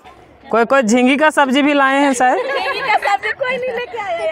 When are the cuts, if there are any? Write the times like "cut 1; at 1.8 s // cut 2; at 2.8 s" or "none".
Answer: cut 1; at 2.2 s

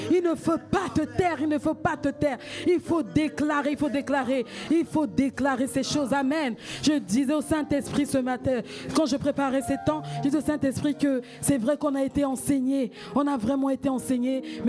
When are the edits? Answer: none

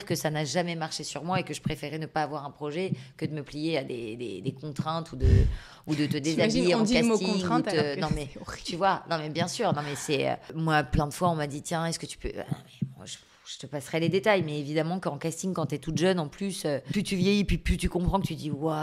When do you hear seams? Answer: cut 1; at 10.5 s // cut 2; at 16.9 s

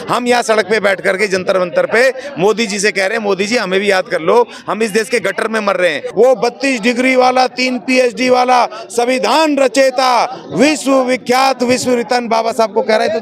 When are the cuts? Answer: cut 1; at 6.0 s

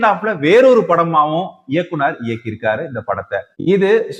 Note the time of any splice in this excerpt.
none

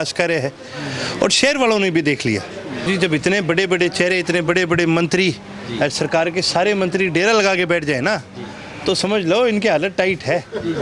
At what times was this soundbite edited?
cut 1; at 2.9 s

